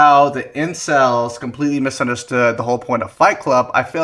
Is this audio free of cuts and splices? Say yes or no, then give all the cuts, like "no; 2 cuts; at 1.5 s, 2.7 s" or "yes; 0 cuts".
yes; 0 cuts